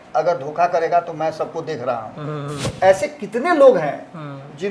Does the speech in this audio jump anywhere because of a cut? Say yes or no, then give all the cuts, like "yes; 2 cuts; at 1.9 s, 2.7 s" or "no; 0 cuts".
yes; 1 cut; at 2.7 s